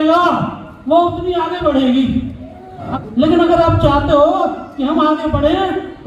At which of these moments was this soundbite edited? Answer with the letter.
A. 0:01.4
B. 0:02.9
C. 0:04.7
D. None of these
B